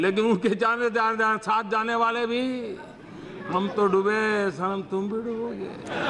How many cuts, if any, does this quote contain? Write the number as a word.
zero